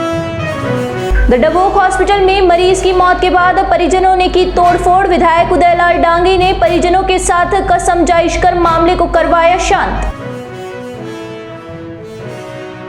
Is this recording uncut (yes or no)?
no